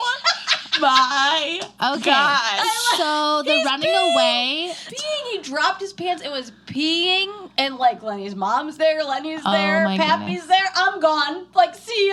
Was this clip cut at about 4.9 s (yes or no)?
yes